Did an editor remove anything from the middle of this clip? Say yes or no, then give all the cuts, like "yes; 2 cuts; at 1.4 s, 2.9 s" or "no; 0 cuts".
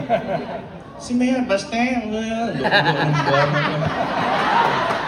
no; 0 cuts